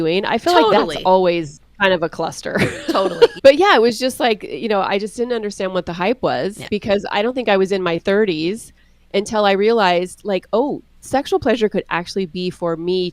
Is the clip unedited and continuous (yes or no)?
no